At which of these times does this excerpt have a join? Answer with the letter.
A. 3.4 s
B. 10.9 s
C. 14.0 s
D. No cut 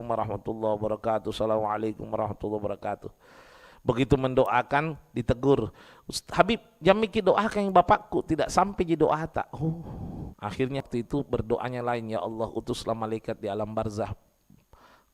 B